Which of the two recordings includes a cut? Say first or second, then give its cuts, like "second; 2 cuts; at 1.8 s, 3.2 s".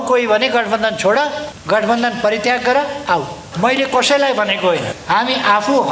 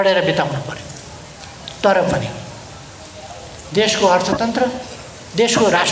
first; 3 cuts; at 1.5 s, 3.4 s, 4.9 s